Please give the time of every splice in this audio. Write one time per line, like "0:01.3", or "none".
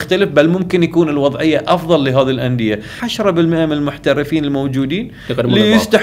0:03.0